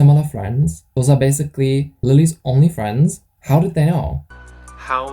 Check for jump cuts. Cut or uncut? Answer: cut